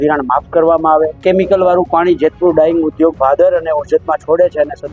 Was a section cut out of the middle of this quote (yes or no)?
yes